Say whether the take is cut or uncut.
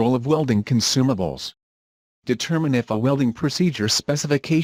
uncut